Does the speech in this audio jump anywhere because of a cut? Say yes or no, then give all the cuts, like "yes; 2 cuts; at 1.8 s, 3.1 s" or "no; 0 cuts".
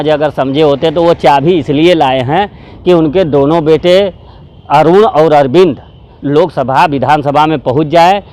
no; 0 cuts